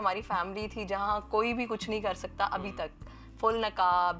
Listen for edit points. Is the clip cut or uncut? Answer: uncut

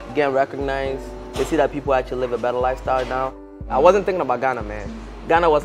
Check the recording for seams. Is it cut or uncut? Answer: cut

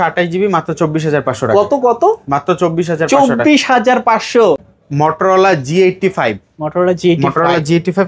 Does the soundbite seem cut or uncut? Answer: cut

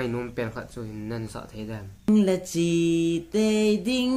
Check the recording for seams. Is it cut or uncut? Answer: cut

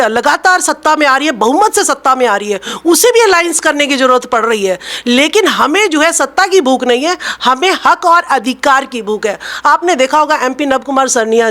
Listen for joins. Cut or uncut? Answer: uncut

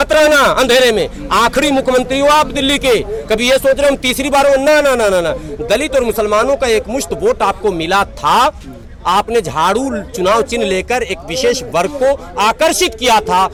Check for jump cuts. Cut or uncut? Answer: uncut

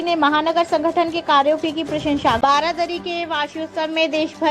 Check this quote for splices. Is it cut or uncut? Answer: cut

